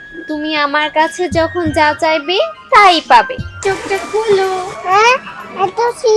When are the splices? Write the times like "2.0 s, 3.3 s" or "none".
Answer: 3.6 s